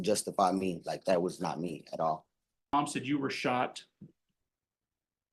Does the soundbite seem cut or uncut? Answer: cut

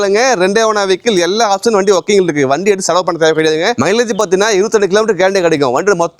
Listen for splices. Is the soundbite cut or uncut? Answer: uncut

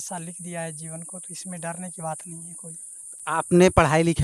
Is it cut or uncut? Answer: uncut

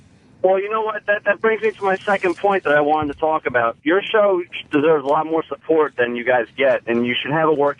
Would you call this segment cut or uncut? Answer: cut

